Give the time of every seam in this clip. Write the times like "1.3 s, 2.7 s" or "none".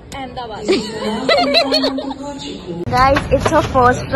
2.8 s